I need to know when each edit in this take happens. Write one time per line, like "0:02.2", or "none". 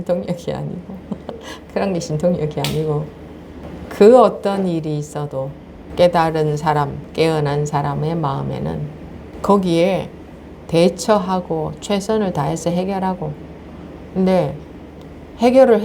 0:01.3
0:03.6
0:05.7
0:09.2

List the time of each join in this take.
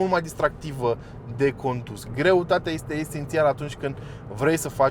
0:01.9

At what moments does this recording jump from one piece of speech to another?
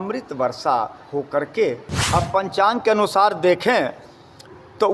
0:01.9

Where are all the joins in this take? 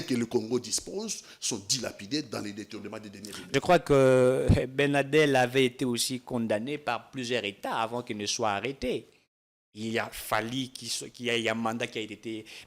0:03.4

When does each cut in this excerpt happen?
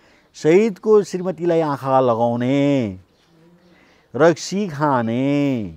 none

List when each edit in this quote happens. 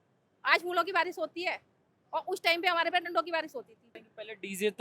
none

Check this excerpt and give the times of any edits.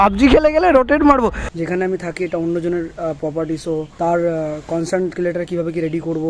0:01.5

